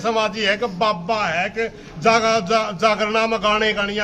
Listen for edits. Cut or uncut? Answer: uncut